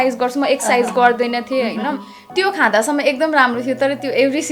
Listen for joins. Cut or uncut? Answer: cut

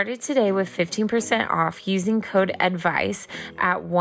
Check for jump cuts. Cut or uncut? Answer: uncut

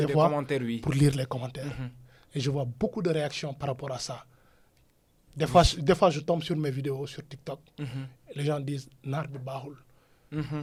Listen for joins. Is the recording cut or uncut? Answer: uncut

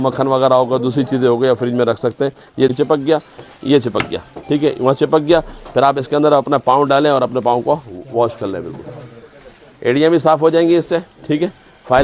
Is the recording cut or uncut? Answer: cut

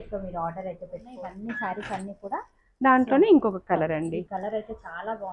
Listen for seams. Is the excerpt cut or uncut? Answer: cut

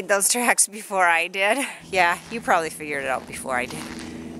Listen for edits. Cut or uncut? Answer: cut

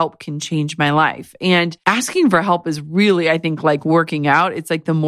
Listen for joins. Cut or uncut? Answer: cut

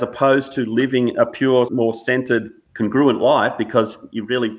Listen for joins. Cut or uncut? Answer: cut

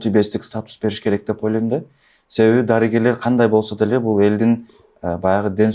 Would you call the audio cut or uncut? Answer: uncut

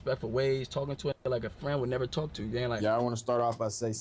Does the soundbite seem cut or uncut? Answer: cut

